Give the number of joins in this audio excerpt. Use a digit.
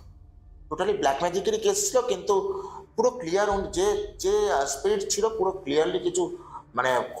0